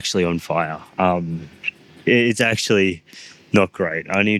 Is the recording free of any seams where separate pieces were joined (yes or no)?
yes